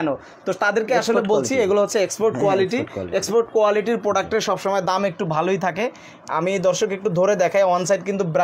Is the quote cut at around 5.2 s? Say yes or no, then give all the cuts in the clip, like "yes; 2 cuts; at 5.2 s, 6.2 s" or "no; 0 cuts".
no; 0 cuts